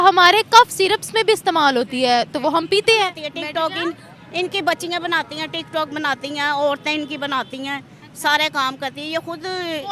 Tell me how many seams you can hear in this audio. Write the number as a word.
one